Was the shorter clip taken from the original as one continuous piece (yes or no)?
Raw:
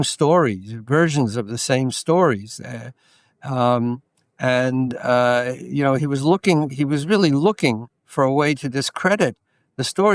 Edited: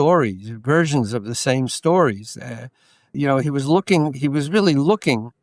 no